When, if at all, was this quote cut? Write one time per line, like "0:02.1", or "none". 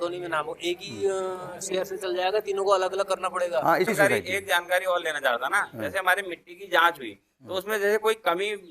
0:03.9